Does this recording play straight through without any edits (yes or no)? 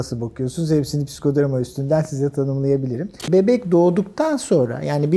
no